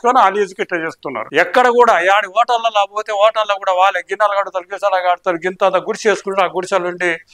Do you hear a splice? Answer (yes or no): yes